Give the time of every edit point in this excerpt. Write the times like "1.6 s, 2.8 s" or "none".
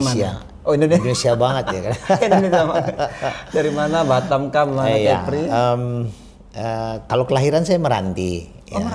none